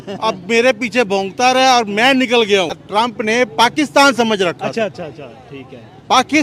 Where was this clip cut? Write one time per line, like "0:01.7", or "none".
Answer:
0:02.8